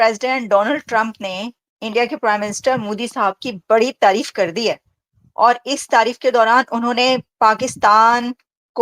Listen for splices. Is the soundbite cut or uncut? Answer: uncut